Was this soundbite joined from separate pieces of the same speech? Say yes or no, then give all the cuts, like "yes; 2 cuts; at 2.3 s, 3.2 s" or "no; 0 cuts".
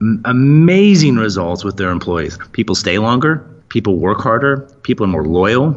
yes; 1 cut; at 3.5 s